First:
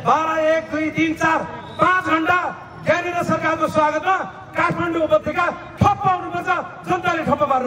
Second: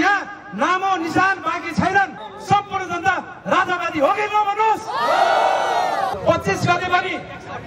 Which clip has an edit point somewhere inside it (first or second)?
second